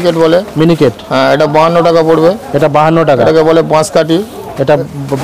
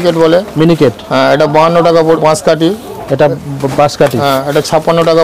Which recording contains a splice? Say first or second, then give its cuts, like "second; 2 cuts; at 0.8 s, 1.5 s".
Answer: second; 1 cut; at 2.2 s